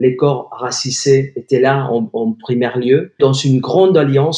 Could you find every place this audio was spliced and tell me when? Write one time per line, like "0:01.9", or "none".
0:03.2

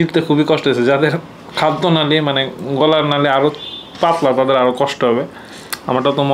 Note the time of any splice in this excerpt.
none

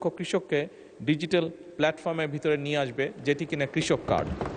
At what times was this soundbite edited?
none

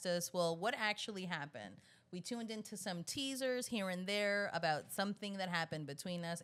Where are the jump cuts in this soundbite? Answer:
none

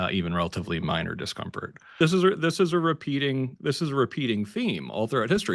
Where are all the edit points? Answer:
0:02.0

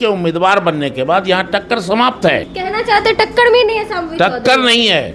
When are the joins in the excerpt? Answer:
0:02.5

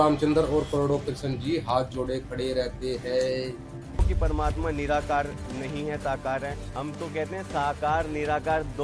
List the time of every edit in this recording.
0:04.1

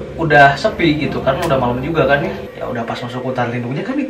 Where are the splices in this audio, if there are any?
0:02.5

